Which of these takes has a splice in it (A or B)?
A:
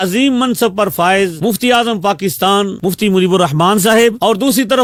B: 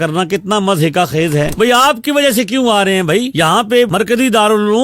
B